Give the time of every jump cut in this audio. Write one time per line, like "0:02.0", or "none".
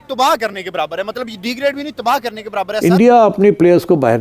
0:02.7